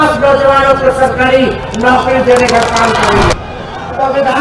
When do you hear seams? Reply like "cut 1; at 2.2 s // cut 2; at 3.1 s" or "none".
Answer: cut 1; at 3.3 s